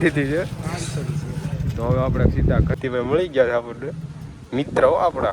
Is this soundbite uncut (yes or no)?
no